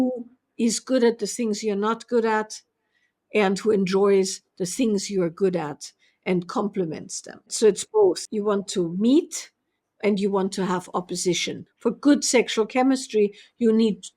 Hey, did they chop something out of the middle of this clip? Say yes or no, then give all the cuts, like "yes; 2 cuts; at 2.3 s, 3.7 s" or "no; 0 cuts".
yes; 3 cuts; at 7.5 s, 8.3 s, 11.7 s